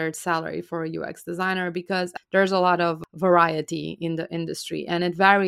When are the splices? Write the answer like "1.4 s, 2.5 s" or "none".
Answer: 2.1 s, 3.0 s